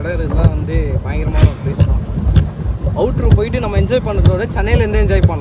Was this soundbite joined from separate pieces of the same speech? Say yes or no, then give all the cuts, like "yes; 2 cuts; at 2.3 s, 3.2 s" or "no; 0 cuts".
no; 0 cuts